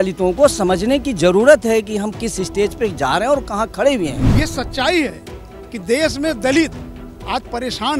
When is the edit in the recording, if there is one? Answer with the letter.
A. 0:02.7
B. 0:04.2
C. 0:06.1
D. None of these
B